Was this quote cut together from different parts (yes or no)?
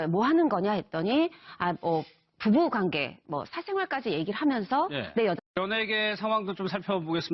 no